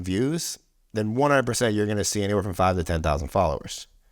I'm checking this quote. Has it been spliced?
no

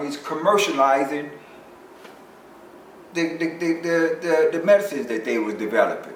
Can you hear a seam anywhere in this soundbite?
no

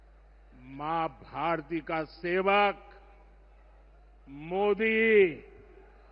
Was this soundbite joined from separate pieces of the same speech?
no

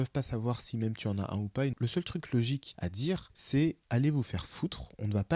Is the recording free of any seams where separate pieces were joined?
no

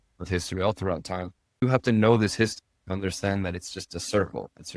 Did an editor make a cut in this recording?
yes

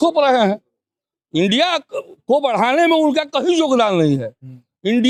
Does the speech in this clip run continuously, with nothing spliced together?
yes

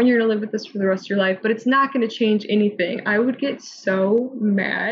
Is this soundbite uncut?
yes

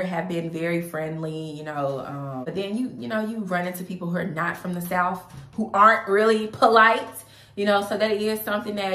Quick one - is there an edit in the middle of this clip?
yes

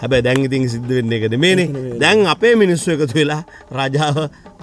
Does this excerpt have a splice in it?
no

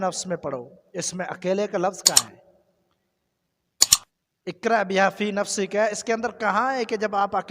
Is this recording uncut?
yes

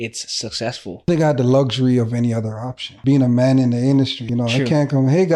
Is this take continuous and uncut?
no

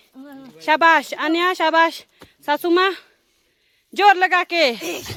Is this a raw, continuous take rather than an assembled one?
yes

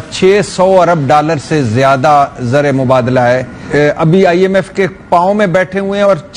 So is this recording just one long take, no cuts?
no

